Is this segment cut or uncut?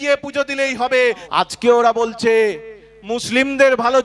cut